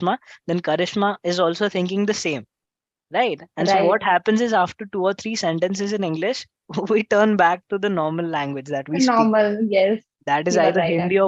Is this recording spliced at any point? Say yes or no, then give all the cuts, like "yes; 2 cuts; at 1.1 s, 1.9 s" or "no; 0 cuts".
no; 0 cuts